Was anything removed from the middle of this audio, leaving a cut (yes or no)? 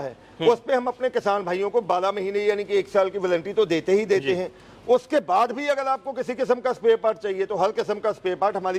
no